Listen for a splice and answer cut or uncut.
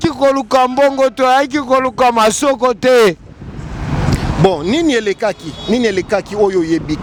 uncut